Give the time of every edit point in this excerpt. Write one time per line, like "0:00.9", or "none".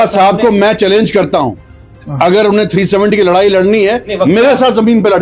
none